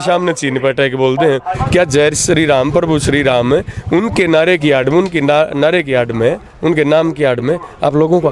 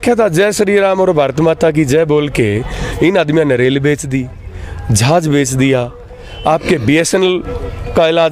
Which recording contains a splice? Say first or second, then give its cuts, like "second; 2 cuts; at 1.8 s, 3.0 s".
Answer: first; 1 cut; at 1.6 s